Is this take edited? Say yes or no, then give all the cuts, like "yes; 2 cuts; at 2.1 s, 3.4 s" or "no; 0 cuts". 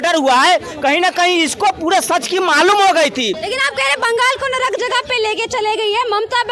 yes; 1 cut; at 3.4 s